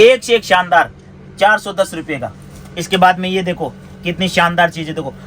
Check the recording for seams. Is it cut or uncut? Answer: uncut